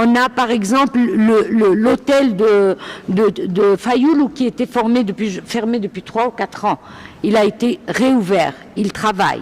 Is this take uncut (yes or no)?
yes